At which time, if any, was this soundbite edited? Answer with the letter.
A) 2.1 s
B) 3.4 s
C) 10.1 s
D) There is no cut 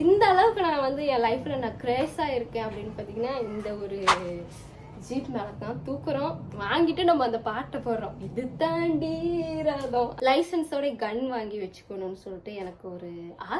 C